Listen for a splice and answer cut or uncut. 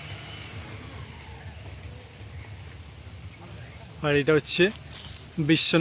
uncut